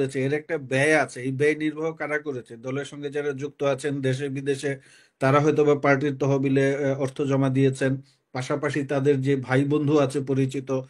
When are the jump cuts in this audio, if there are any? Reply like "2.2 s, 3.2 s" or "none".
none